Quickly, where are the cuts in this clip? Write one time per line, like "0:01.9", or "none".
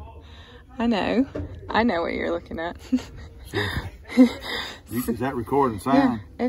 none